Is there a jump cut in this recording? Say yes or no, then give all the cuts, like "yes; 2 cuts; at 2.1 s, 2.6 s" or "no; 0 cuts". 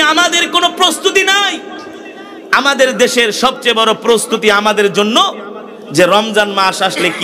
no; 0 cuts